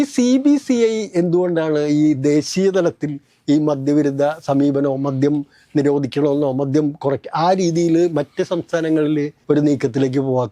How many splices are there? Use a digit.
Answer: 1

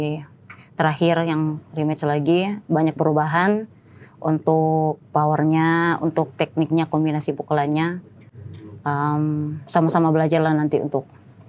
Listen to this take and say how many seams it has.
0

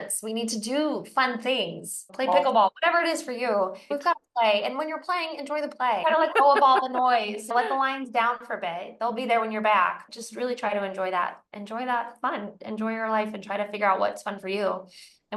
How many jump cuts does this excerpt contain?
6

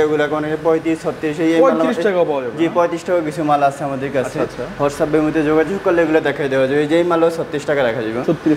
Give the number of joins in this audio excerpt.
0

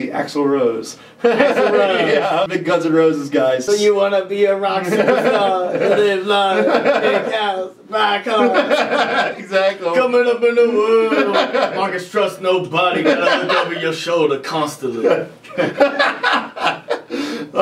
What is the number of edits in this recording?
2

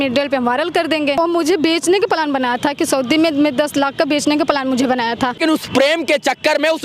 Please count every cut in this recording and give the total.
2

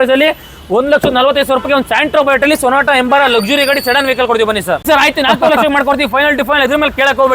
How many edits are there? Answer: 1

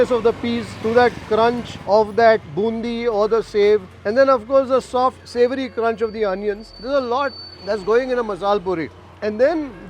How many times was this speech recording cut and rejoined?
2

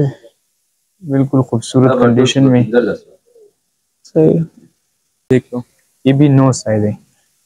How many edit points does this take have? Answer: 1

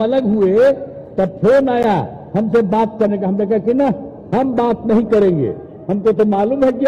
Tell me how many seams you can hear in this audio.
0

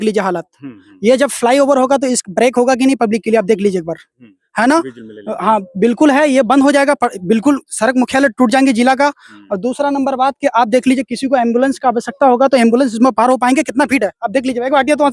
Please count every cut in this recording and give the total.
0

